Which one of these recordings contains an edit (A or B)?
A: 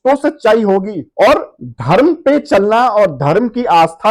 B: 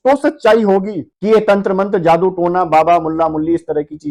A